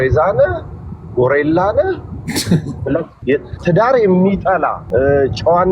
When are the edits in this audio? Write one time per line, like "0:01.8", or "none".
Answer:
0:03.1
0:04.8